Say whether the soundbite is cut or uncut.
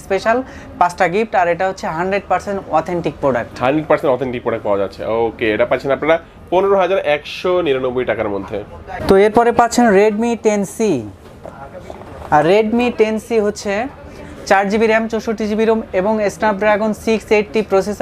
uncut